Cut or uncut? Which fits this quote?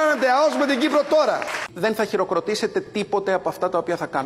cut